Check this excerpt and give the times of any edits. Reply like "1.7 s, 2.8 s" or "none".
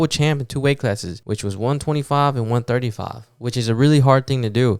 1.1 s